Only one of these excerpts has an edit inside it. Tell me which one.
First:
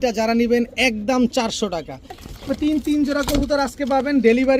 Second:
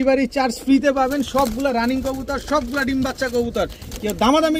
first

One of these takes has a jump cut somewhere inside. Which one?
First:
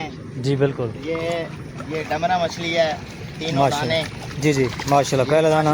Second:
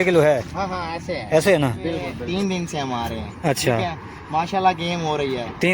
second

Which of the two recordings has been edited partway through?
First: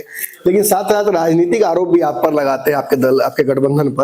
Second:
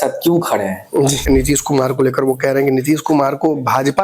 second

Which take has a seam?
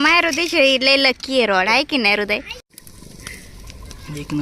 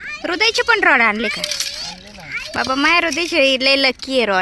first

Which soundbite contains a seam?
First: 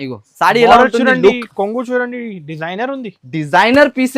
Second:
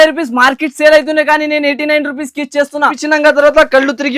second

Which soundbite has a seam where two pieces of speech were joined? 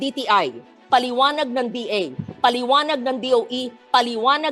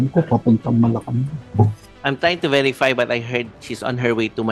second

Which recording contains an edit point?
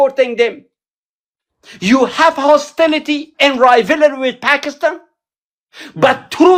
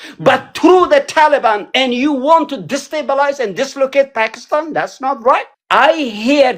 second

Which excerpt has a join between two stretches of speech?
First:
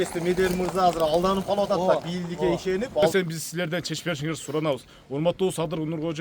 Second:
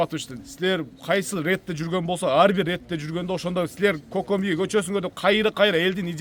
first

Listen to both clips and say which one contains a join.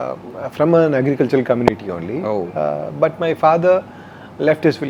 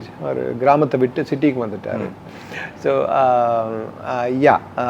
second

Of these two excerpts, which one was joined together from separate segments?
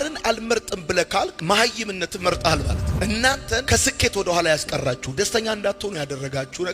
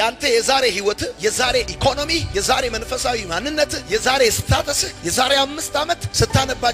first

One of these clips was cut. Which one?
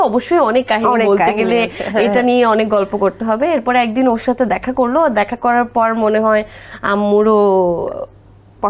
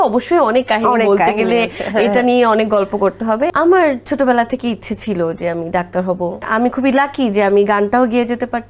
second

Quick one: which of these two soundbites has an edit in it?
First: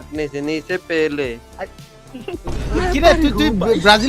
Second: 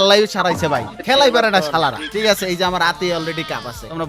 second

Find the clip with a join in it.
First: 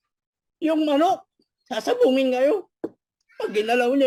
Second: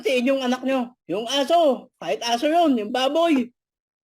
second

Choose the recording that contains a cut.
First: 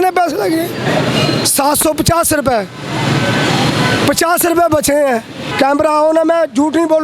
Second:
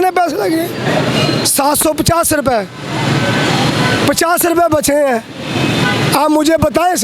first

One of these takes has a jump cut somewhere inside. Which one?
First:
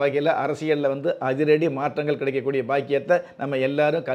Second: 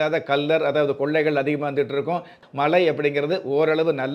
second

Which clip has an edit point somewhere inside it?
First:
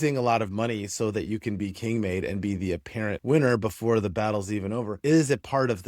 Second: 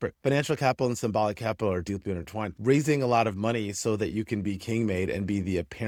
first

